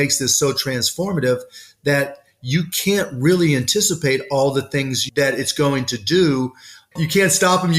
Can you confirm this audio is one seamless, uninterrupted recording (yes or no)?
no